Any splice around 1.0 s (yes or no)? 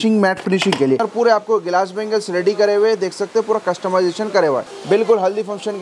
yes